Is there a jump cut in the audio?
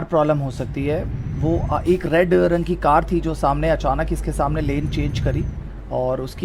no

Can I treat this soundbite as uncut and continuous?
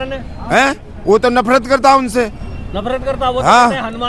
yes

